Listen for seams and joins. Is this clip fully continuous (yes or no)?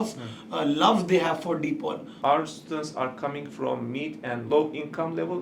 no